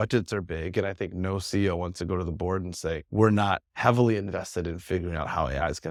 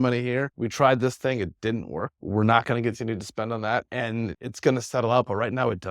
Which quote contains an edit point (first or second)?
second